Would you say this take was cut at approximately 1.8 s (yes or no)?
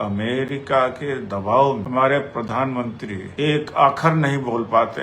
yes